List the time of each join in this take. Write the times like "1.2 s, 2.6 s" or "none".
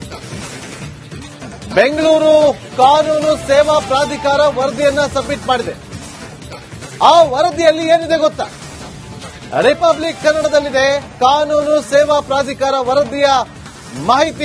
0.9 s